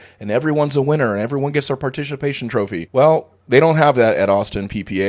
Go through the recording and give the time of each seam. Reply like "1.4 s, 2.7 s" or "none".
2.9 s